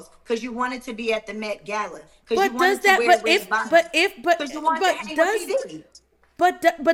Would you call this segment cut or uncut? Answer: uncut